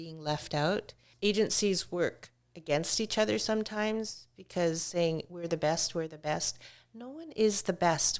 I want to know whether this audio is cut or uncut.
cut